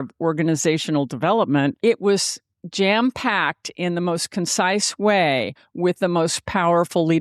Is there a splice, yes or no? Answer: yes